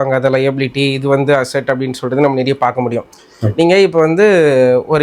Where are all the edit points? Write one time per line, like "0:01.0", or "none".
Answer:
none